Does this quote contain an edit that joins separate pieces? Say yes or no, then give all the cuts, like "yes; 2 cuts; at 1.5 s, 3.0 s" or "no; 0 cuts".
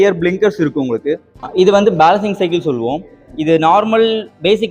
yes; 1 cut; at 1.3 s